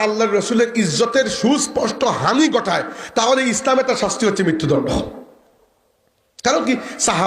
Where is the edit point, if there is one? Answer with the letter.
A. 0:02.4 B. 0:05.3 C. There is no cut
C